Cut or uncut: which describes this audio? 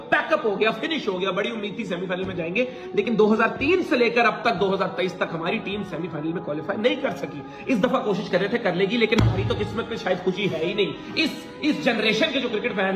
uncut